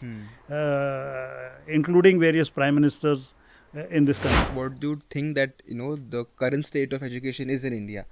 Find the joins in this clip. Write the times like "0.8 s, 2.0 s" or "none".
4.4 s